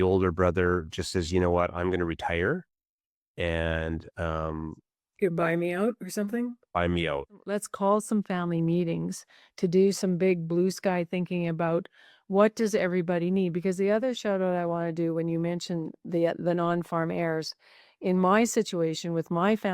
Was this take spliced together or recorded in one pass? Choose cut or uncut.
cut